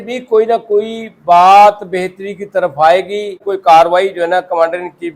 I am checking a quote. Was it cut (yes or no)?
yes